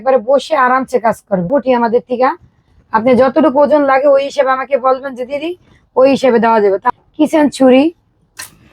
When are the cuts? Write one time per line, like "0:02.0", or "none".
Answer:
0:01.5
0:06.9